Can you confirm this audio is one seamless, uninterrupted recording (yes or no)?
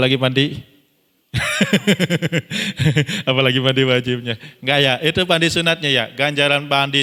yes